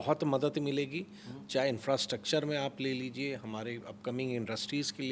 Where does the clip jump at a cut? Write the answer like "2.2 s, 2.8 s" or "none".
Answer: none